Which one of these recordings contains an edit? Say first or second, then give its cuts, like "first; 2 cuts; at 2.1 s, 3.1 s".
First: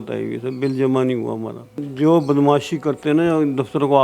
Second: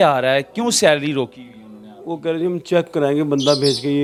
first; 1 cut; at 1.9 s